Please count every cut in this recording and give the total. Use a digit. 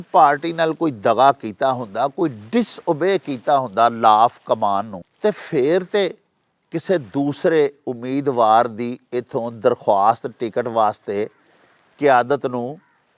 1